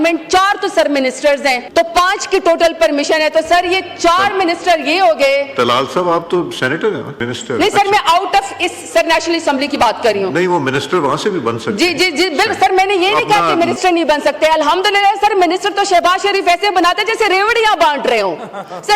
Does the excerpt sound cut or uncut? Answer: cut